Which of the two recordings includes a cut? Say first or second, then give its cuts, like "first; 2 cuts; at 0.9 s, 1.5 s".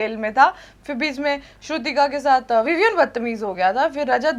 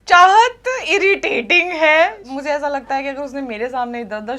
second; 1 cut; at 2.3 s